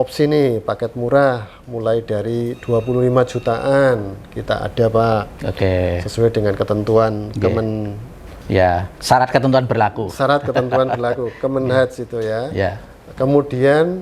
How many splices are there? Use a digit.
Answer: 0